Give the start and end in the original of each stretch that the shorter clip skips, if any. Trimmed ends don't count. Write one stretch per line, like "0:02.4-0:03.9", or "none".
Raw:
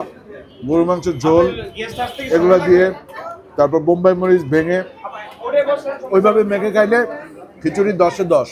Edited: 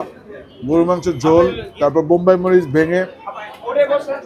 0:01.6-0:03.4